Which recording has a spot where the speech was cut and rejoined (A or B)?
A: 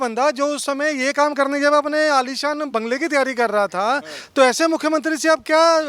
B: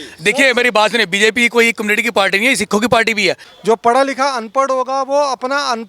B